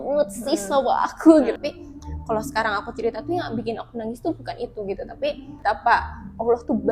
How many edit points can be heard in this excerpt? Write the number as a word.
two